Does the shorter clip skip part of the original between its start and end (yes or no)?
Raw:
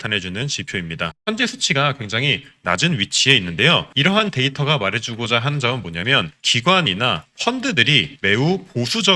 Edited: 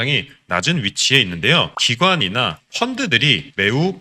yes